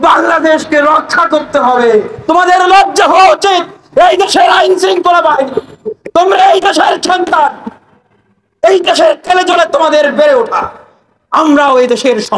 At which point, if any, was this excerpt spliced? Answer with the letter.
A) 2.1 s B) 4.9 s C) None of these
A